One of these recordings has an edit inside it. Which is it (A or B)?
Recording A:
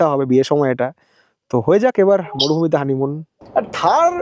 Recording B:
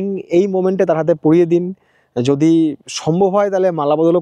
A